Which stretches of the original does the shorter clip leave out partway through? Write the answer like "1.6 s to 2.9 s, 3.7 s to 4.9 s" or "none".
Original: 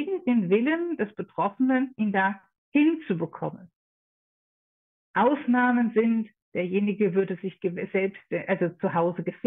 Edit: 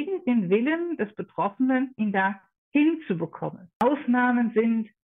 3.8 s to 5.2 s